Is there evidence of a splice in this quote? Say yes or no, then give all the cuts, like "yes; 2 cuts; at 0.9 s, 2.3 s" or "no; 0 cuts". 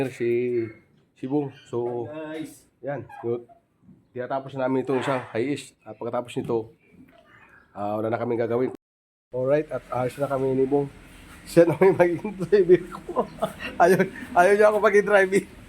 yes; 1 cut; at 8.7 s